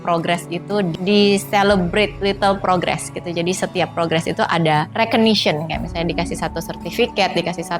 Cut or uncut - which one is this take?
cut